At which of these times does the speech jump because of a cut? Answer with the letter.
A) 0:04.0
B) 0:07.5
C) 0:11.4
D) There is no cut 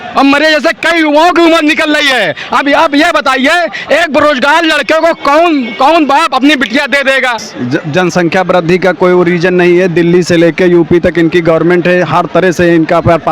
B